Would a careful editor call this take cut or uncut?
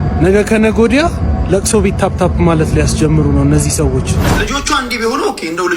cut